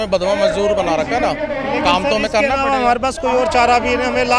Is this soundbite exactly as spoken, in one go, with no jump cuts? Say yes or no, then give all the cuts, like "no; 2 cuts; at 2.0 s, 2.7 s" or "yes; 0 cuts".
yes; 0 cuts